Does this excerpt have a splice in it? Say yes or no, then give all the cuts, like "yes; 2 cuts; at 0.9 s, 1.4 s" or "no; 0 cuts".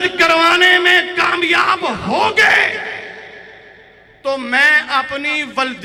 no; 0 cuts